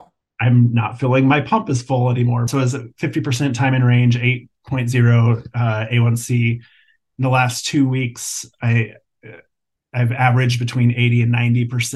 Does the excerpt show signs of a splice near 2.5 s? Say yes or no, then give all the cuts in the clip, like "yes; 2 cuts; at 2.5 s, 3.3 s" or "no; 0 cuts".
yes; 1 cut; at 2.5 s